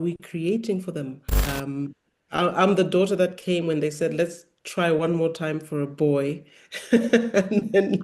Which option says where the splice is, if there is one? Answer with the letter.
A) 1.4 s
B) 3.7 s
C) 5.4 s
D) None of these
A